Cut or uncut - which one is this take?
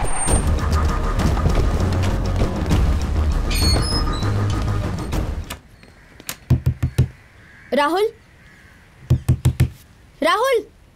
cut